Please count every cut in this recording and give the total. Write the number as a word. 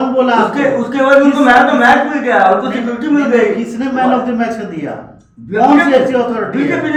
zero